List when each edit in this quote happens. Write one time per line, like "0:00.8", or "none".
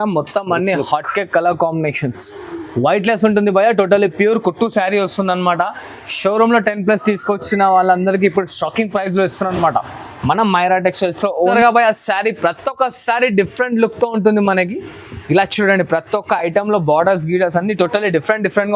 0:11.5